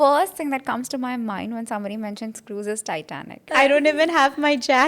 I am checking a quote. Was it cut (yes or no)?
yes